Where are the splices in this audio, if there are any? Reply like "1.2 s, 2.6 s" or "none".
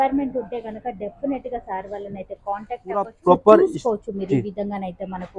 3.1 s